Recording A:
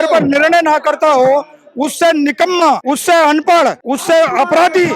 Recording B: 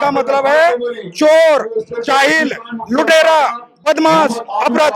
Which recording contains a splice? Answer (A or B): A